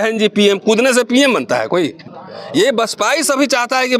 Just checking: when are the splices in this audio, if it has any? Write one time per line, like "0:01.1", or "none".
0:02.0